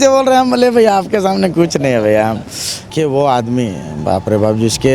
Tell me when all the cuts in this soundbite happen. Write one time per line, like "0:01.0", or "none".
0:02.9